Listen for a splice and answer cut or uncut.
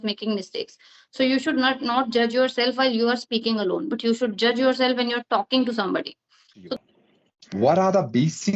cut